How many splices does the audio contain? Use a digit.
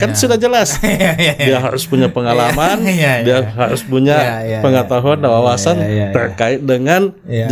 0